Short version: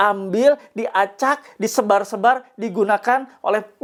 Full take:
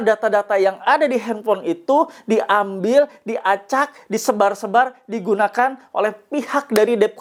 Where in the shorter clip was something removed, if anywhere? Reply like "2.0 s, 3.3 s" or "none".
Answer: none